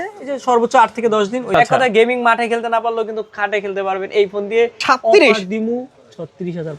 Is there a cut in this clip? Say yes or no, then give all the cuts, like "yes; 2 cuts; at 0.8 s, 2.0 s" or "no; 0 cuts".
yes; 2 cuts; at 1.5 s, 4.8 s